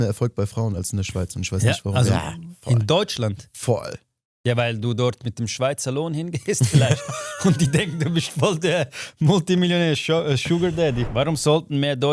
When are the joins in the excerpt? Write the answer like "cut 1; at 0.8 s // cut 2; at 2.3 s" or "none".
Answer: cut 1; at 11.0 s